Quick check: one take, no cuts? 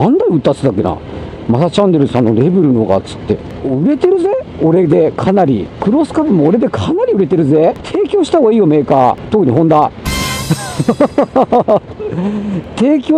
no; 4 cuts; at 3.5 s, 5.7 s, 7.8 s, 9.2 s

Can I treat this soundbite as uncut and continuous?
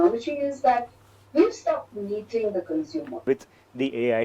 no; 1 cut; at 3.2 s

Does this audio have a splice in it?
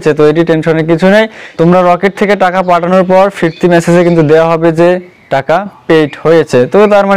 yes; 1 cut; at 1.4 s

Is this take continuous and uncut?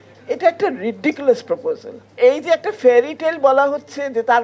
no; 1 cut; at 2.2 s

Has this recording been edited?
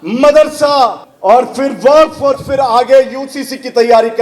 yes; 1 cut; at 1.1 s

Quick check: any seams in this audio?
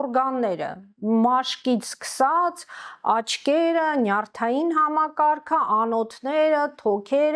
no; 0 cuts

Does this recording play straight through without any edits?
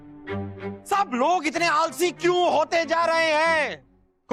yes; 0 cuts

